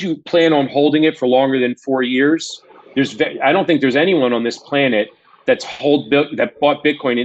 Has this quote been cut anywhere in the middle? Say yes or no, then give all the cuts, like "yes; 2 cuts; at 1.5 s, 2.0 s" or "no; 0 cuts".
no; 0 cuts